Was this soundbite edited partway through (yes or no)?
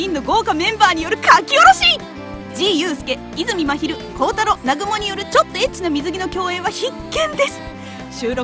no